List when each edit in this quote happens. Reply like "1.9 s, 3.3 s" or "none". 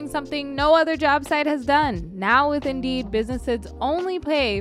none